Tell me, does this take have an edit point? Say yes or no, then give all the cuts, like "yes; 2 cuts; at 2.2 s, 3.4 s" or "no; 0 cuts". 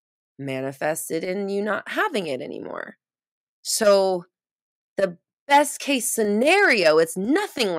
no; 0 cuts